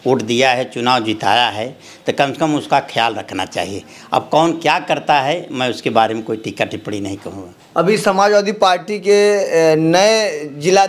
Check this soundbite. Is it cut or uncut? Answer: uncut